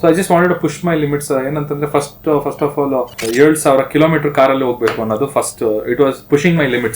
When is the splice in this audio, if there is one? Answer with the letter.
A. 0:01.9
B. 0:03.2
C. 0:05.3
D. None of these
B